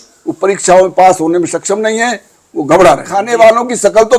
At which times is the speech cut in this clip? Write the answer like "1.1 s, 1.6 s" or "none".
3.2 s